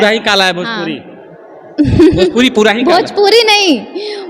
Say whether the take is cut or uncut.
uncut